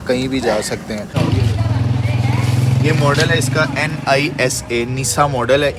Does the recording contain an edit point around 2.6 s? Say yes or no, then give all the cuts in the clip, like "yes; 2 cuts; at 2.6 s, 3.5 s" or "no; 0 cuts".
no; 1 cut; at 1.2 s